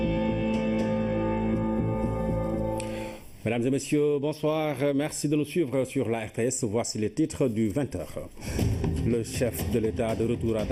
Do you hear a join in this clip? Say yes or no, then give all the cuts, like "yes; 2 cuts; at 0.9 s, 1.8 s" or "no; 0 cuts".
no; 0 cuts